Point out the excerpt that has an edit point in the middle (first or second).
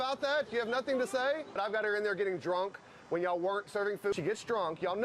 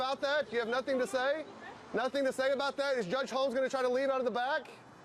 first